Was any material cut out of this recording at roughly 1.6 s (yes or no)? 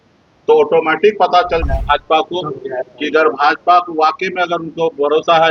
yes